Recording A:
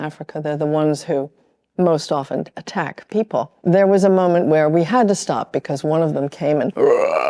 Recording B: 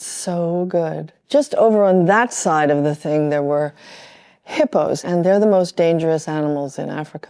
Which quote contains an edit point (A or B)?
B